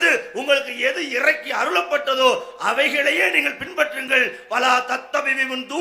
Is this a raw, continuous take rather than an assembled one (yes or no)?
yes